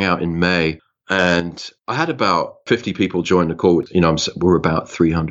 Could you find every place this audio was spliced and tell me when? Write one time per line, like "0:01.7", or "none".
0:02.6
0:03.8